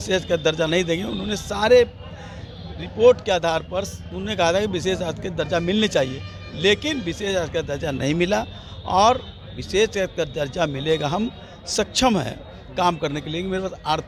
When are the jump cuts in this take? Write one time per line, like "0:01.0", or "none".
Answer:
none